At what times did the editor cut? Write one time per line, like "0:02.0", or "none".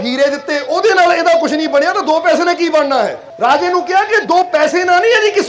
0:03.2